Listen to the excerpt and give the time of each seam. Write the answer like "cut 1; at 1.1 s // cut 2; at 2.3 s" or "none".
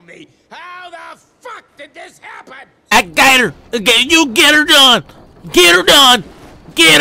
cut 1; at 2.9 s